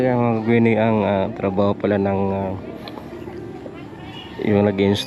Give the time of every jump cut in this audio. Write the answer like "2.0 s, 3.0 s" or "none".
none